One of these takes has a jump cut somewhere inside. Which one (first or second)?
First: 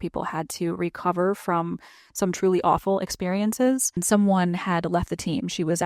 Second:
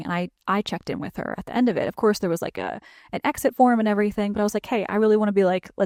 first